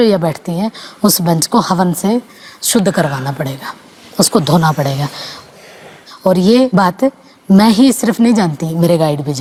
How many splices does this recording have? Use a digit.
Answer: 0